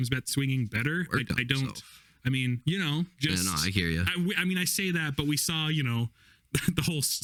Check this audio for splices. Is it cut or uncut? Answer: uncut